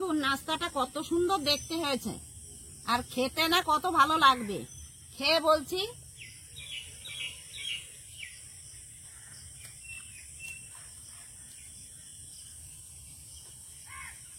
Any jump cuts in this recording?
no; 0 cuts

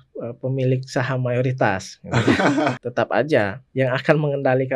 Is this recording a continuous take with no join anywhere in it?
no; 2 cuts; at 2.8 s, 3.6 s

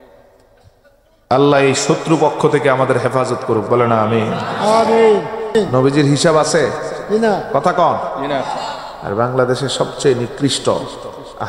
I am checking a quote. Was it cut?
yes; 1 cut; at 5.8 s

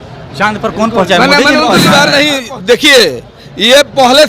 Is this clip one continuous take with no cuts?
no; 1 cut; at 1.9 s

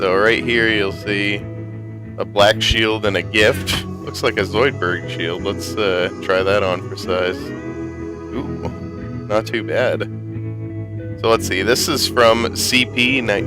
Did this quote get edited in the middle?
yes; 1 cut; at 5.0 s

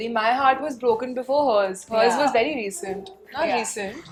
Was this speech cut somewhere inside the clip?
no; 0 cuts

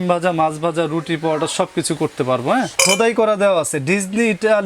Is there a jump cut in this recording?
yes; 1 cut; at 2.7 s

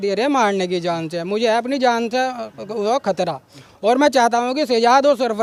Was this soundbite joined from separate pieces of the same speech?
no; 0 cuts

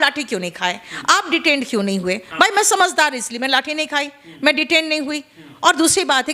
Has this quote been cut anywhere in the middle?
no; 0 cuts

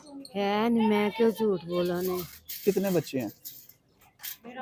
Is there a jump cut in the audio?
no; 0 cuts

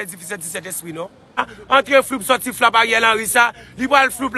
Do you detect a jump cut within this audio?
yes; 1 cut; at 1.5 s

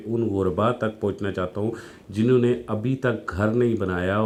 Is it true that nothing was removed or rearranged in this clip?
yes; 0 cuts

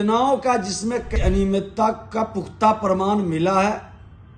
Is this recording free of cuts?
no; 1 cut; at 1.1 s

